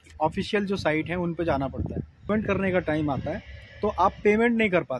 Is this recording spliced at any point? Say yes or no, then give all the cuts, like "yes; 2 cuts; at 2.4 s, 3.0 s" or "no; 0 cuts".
yes; 1 cut; at 2.3 s